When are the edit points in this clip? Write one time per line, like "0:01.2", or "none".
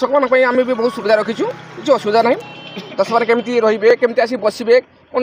none